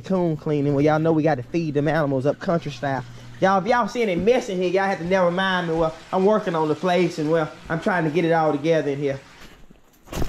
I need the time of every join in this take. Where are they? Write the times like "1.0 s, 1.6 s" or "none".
9.3 s